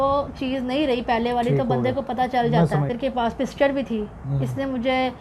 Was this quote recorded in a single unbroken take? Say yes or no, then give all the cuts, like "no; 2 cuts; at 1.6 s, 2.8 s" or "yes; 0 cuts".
no; 1 cut; at 2.9 s